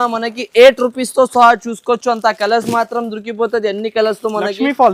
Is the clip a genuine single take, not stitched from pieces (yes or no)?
yes